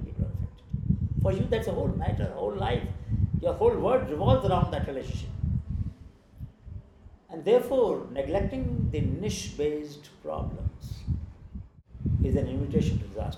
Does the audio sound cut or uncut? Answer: cut